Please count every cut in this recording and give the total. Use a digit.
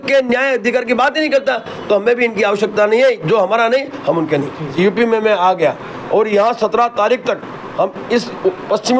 1